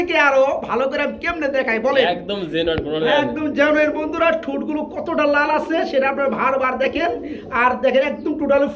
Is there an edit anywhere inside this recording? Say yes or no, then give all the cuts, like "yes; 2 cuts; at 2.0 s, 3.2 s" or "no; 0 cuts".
no; 0 cuts